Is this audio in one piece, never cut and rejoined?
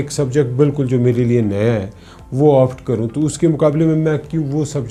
yes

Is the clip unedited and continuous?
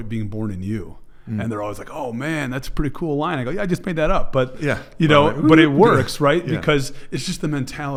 yes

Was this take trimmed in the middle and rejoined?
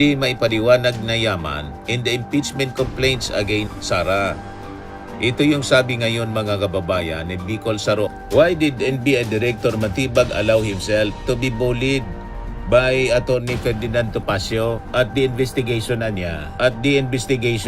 yes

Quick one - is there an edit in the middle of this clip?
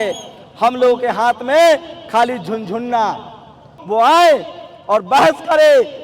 yes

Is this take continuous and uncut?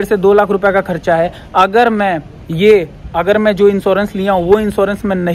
yes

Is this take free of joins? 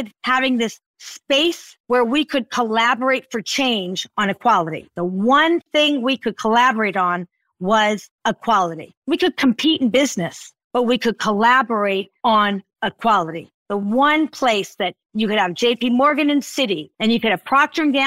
yes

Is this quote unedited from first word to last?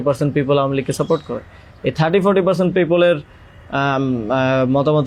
yes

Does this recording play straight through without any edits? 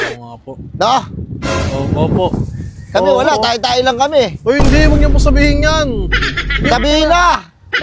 yes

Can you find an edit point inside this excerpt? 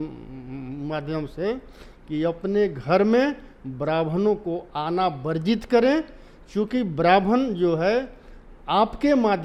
no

